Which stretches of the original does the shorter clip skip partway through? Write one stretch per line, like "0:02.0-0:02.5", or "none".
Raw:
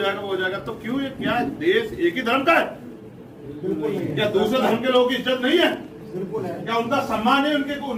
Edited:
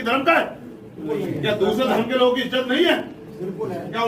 0:03.2-0:03.8